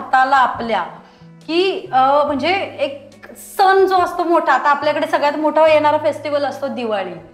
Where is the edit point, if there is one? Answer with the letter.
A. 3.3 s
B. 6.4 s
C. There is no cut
C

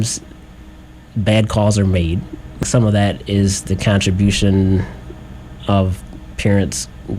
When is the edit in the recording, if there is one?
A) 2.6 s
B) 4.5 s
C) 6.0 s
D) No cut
A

